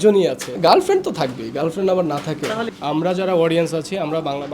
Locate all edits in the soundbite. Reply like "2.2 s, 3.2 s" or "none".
2.7 s